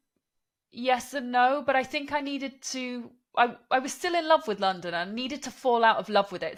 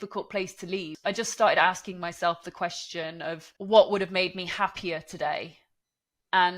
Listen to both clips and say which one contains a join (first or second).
second